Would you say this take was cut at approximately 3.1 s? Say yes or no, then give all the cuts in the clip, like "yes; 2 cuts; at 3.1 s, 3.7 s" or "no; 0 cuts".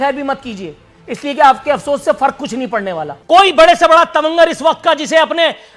yes; 1 cut; at 3.1 s